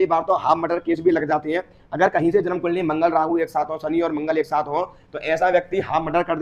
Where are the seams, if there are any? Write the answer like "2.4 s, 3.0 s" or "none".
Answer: none

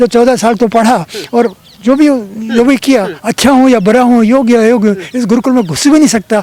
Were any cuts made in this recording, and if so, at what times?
none

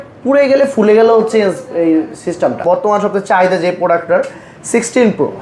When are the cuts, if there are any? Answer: 2.6 s

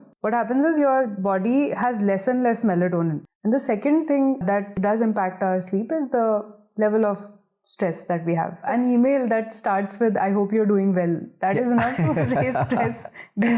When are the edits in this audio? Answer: 3.2 s, 8.6 s

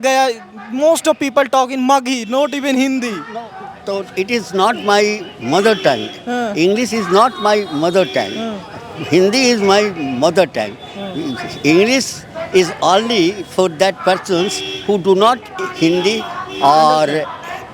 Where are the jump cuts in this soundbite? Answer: none

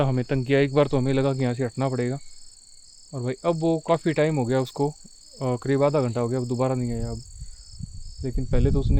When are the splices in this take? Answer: none

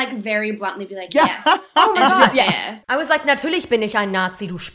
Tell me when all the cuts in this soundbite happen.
2.8 s

